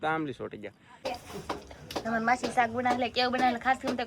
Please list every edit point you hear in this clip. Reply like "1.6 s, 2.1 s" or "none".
0.9 s

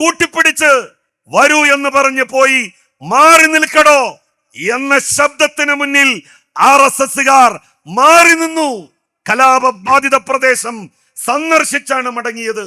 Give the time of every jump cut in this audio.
none

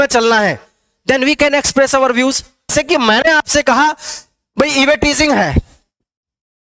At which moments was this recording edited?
2.7 s

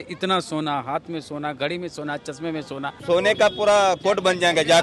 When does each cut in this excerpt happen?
2.9 s

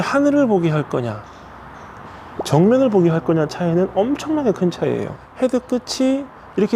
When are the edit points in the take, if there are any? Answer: 5.2 s

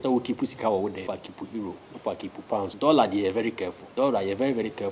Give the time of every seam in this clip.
1.0 s, 2.7 s, 3.8 s

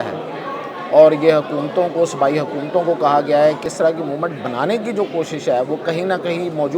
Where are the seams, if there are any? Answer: 3.7 s

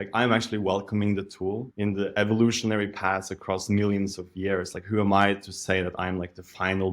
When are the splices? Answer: 1.7 s

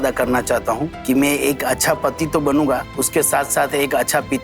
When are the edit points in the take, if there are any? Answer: 0.9 s, 2.9 s

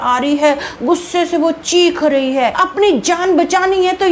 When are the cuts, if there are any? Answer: 2.6 s

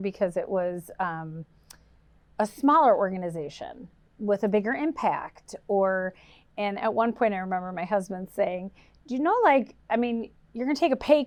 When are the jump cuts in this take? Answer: none

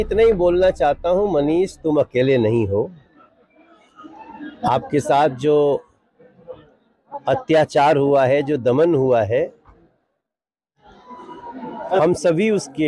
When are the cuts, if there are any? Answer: none

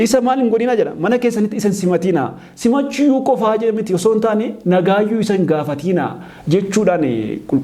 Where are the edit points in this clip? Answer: none

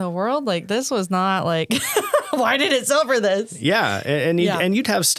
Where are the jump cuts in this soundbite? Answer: none

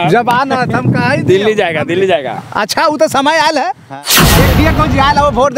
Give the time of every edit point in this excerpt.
4.2 s

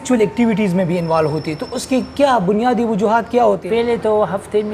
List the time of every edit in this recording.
3.6 s

